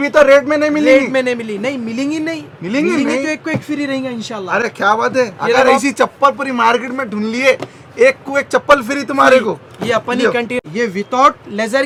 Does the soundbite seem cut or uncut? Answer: uncut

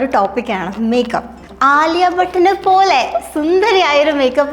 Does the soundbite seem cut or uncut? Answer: cut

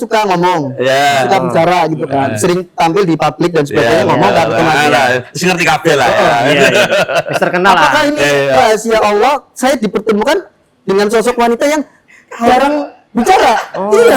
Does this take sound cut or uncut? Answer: uncut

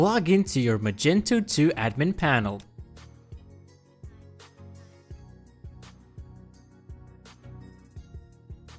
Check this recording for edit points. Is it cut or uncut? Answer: uncut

